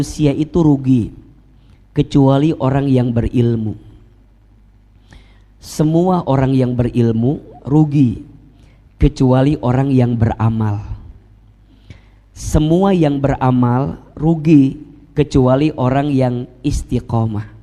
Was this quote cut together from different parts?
no; 0 cuts

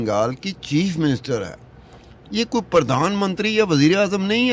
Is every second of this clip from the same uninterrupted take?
yes; 0 cuts

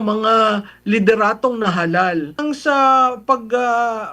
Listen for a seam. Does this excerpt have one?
yes; 1 cut; at 2.4 s

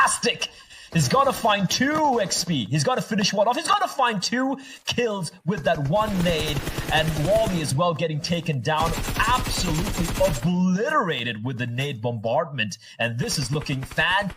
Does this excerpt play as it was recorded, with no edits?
yes; 0 cuts

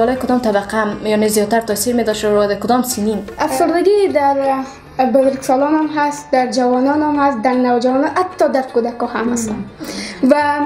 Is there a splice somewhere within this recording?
yes; 1 cut; at 3.3 s

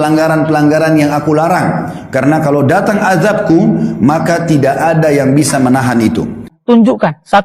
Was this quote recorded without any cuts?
no; 1 cut; at 6.5 s

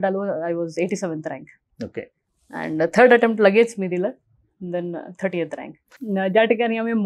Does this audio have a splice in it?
yes; 1 cut; at 5.9 s

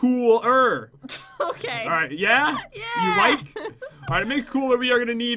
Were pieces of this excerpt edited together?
no; 0 cuts

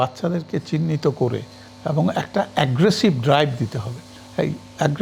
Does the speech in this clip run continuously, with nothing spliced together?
yes; 0 cuts

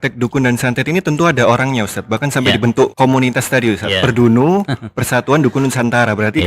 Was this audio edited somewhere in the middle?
yes; 1 cut; at 2.9 s

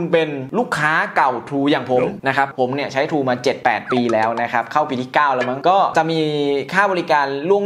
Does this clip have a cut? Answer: yes; 1 cut; at 2.5 s

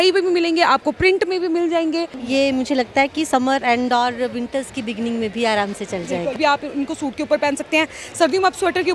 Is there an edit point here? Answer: yes; 2 cuts; at 2.2 s, 6.4 s

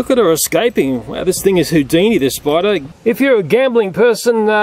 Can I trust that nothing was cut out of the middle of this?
no; 1 cut; at 2.9 s

